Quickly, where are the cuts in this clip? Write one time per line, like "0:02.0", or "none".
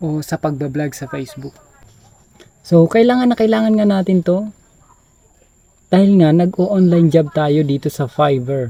none